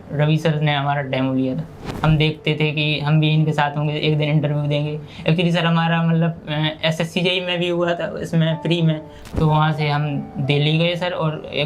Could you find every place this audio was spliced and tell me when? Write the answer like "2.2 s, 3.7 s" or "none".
1.8 s, 9.2 s